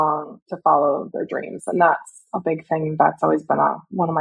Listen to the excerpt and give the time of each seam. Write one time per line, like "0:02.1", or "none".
none